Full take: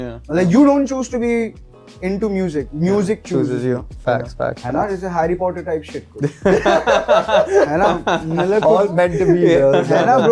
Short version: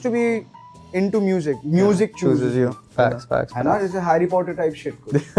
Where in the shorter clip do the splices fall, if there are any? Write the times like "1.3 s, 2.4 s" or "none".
none